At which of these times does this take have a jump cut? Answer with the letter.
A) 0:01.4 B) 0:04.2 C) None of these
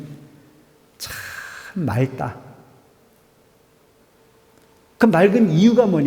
B